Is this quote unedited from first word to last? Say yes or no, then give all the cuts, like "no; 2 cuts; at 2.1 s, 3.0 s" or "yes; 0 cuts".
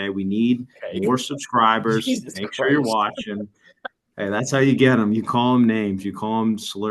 yes; 0 cuts